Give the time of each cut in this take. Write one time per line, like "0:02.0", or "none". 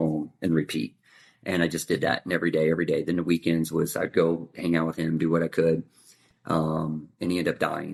none